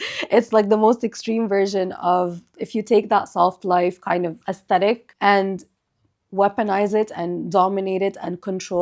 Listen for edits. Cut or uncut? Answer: cut